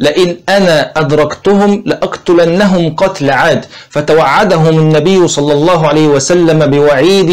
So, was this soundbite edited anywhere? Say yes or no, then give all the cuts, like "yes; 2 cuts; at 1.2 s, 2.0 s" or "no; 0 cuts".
no; 0 cuts